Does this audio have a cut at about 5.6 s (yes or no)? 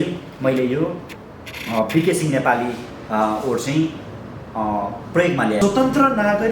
yes